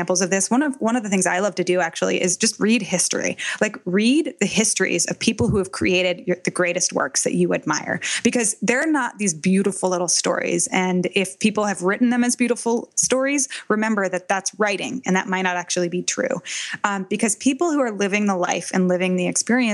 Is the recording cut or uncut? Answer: uncut